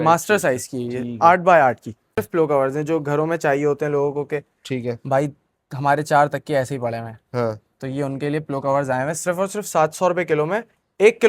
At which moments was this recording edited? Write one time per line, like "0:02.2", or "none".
0:02.2